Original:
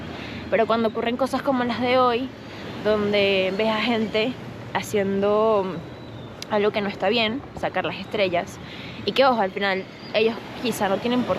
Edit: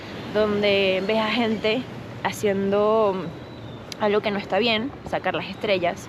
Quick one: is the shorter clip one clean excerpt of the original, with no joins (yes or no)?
yes